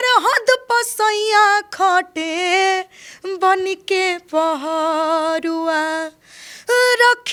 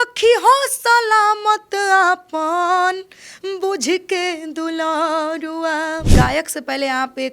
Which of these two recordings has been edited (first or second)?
second